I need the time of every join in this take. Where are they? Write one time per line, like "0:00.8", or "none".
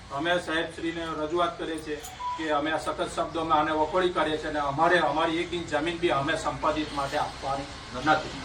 none